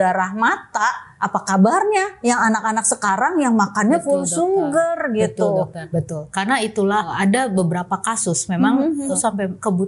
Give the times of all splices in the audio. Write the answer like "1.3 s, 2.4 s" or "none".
1.1 s, 5.9 s, 7.1 s, 9.2 s